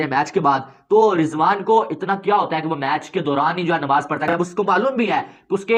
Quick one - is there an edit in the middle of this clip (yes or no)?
no